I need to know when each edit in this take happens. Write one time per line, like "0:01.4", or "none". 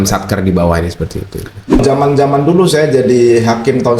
0:01.8